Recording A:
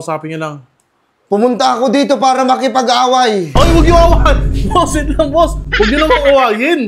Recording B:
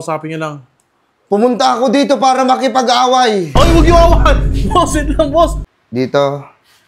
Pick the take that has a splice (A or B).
B